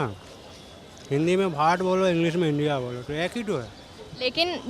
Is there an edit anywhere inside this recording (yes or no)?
no